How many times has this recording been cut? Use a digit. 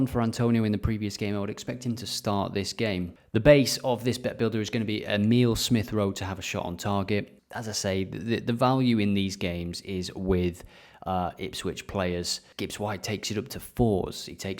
3